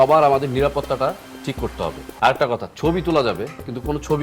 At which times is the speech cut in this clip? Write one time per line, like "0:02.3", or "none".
0:02.1